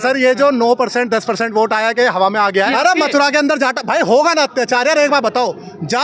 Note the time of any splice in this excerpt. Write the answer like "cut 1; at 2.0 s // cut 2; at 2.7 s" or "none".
cut 1; at 2.7 s